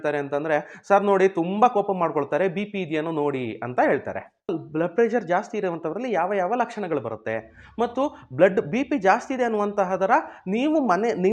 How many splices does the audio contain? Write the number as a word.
one